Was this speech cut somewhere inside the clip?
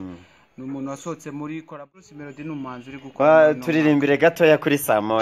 yes; 1 cut; at 1.7 s

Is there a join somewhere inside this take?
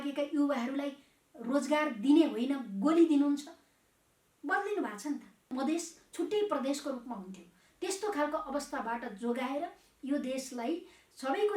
yes; 1 cut; at 5.5 s

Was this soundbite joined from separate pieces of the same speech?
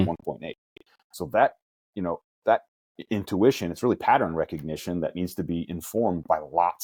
no; 0 cuts

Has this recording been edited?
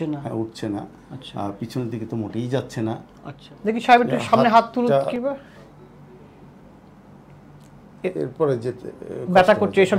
yes; 1 cut; at 3.5 s

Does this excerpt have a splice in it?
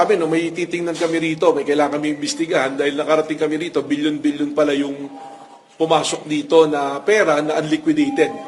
no; 0 cuts

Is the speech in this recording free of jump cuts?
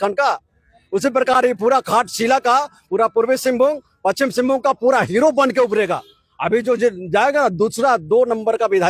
yes; 0 cuts

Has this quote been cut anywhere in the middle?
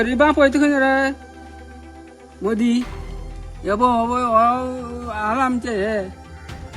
no; 0 cuts

